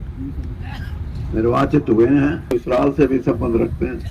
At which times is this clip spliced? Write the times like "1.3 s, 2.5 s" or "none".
2.5 s